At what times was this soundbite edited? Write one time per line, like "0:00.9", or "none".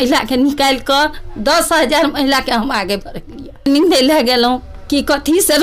0:03.6